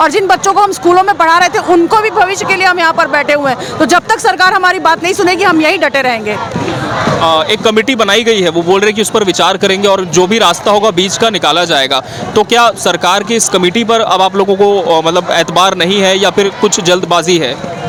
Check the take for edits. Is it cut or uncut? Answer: uncut